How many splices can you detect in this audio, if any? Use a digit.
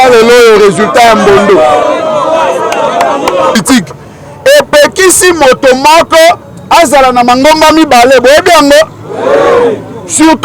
1